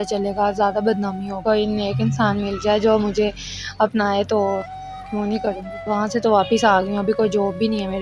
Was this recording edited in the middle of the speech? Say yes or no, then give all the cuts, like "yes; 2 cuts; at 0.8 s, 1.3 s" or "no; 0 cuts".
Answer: yes; 2 cuts; at 1.4 s, 5.8 s